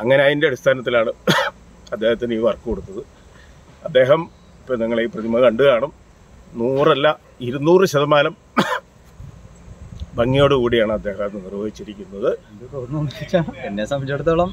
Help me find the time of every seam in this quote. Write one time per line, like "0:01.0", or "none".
0:12.6